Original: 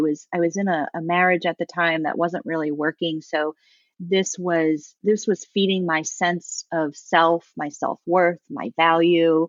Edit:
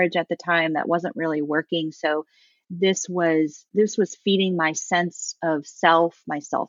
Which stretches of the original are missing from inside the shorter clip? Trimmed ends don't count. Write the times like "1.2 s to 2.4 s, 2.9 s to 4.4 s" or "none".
none